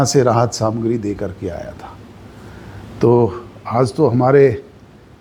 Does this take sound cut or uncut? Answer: uncut